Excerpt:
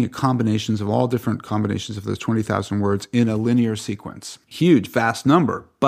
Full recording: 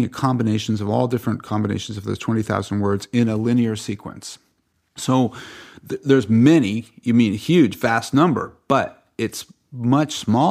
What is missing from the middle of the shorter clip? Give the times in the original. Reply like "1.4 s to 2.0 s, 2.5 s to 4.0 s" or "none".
4.5 s to 7.4 s